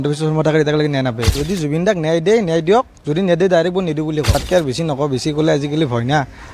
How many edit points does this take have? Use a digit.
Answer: 2